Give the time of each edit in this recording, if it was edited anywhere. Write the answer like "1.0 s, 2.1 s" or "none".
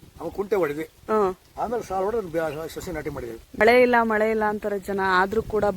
3.6 s